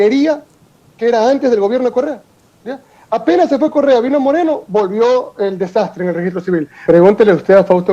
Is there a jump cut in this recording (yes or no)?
yes